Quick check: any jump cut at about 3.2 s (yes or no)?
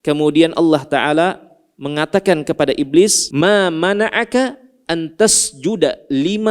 yes